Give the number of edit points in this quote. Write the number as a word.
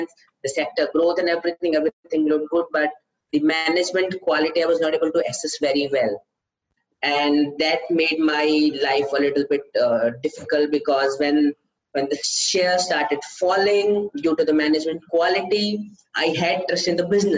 zero